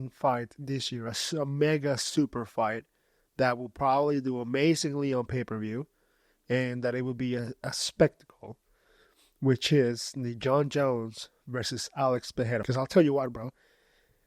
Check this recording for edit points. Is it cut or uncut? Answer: cut